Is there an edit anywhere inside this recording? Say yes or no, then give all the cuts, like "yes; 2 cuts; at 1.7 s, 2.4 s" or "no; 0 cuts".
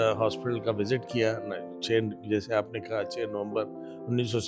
no; 0 cuts